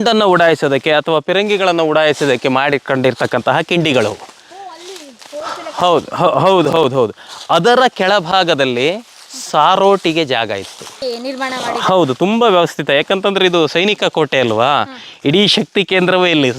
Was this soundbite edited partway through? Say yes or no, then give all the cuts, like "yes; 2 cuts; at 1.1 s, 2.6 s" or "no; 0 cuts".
yes; 1 cut; at 10.9 s